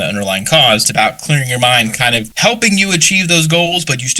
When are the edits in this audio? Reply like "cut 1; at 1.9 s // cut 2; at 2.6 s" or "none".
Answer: cut 1; at 0.9 s // cut 2; at 2.3 s

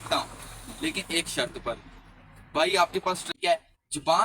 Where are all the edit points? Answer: cut 1; at 3.3 s

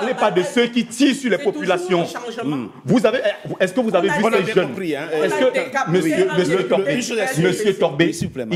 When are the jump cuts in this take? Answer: cut 1; at 6.0 s

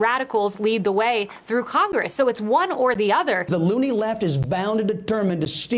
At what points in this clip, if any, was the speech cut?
cut 1; at 3.5 s

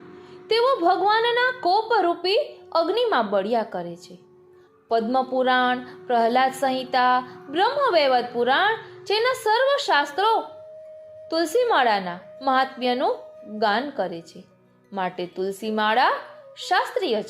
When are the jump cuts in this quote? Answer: none

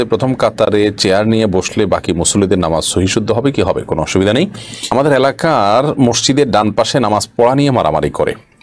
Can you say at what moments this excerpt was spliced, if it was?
cut 1; at 4.9 s

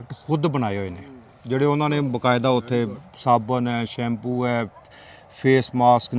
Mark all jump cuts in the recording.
none

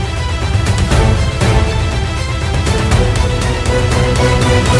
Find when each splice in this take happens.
none

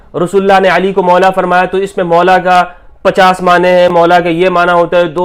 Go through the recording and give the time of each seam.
none

